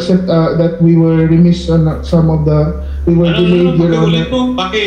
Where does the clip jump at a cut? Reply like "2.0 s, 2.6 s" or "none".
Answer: none